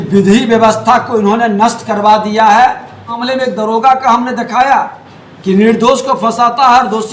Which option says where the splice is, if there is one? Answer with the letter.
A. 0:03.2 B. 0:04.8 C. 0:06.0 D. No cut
A